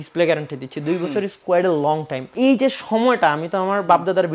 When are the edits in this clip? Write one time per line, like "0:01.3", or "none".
0:02.2